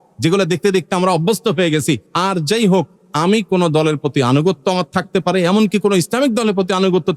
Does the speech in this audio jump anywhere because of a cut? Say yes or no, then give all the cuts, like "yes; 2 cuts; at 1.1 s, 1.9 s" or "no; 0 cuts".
yes; 2 cuts; at 2.1 s, 3.0 s